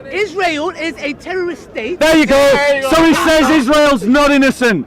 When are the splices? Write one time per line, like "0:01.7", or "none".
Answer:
none